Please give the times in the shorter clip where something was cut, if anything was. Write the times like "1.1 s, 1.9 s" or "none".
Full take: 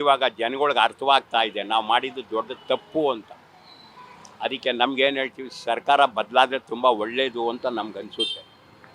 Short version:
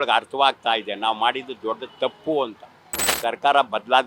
3.0 s